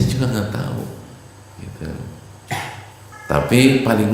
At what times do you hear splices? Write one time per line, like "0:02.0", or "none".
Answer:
0:03.1